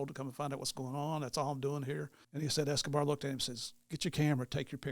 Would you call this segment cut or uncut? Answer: cut